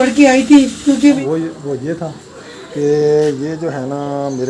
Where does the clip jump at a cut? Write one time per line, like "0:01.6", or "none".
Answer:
0:01.2